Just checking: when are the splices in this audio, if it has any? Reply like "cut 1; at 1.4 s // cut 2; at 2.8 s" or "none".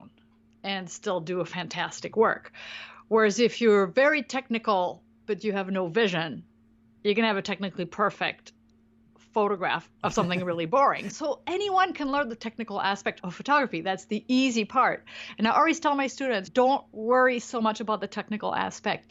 cut 1; at 9.9 s // cut 2; at 13.3 s